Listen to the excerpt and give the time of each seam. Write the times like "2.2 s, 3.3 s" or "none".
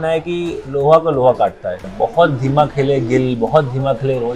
1.9 s